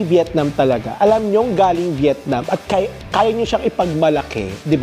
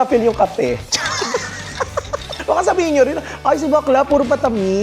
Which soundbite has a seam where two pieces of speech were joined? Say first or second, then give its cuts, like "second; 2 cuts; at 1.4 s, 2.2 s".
second; 1 cut; at 2.4 s